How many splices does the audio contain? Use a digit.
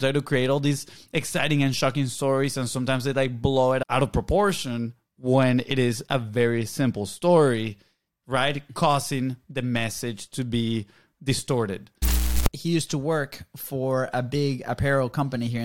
2